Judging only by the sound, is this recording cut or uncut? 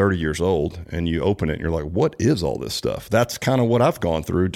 uncut